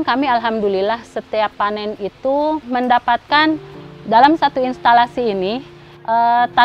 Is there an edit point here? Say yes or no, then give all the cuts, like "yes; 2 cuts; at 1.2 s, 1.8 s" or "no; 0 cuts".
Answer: no; 0 cuts